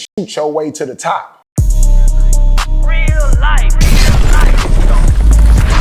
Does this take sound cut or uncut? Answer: cut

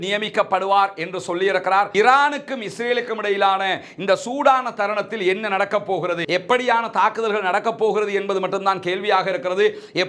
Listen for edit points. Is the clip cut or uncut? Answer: cut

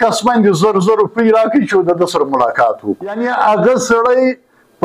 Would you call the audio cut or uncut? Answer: cut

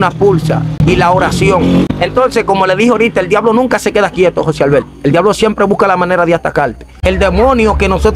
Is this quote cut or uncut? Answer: cut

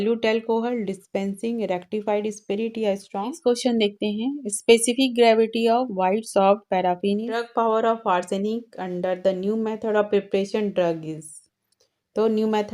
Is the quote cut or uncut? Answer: cut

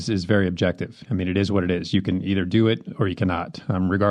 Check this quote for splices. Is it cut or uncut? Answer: uncut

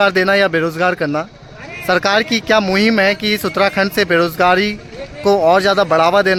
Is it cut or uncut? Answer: uncut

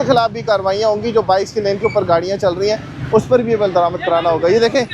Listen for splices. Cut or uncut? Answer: uncut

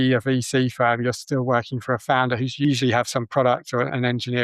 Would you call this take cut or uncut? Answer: cut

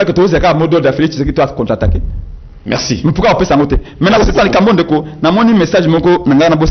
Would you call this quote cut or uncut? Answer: uncut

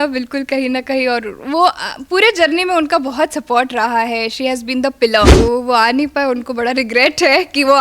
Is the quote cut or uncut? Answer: cut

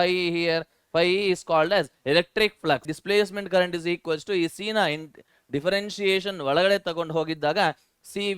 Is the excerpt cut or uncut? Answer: cut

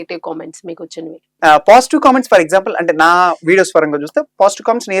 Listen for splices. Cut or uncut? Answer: cut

